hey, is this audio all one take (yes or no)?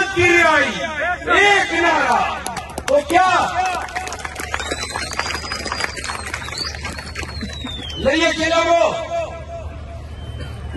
yes